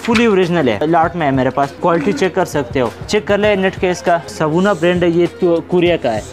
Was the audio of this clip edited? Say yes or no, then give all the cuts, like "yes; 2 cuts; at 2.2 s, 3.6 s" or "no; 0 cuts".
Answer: yes; 4 cuts; at 0.8 s, 1.7 s, 3.0 s, 4.3 s